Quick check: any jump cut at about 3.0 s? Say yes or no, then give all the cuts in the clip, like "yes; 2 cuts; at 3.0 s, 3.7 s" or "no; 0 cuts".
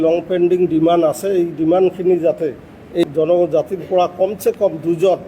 yes; 1 cut; at 3.0 s